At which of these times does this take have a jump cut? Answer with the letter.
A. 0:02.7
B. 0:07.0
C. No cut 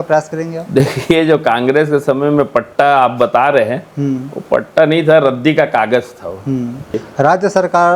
B